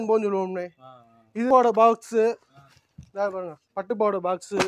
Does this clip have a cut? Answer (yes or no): yes